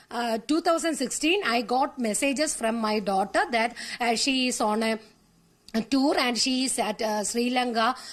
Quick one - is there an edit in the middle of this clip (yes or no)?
no